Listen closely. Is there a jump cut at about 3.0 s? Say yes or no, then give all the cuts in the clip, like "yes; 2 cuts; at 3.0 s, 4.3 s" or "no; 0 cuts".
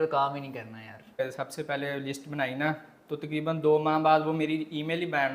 no; 1 cut; at 1.2 s